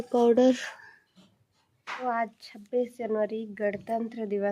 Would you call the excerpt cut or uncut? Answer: cut